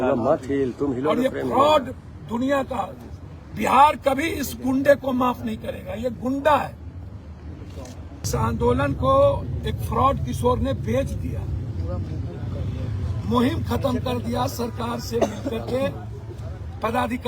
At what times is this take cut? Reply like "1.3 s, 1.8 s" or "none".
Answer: 8.3 s